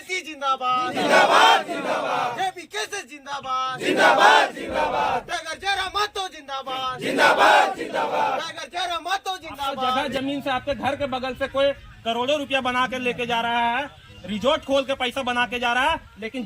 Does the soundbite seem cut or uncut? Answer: cut